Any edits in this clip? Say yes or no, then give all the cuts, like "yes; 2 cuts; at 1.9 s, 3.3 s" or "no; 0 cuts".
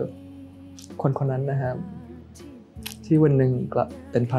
no; 0 cuts